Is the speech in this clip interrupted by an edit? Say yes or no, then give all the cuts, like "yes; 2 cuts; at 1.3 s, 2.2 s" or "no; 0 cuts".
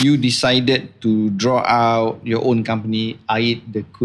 no; 0 cuts